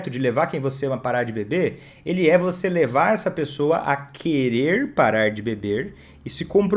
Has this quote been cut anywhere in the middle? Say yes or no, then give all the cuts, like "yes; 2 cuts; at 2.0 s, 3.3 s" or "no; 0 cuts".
no; 0 cuts